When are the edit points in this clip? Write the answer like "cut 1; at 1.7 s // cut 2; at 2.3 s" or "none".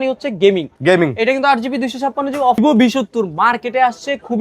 cut 1; at 2.6 s